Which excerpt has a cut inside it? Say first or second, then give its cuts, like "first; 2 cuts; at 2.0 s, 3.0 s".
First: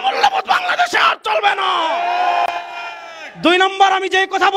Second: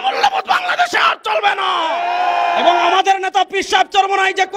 second; 1 cut; at 2.6 s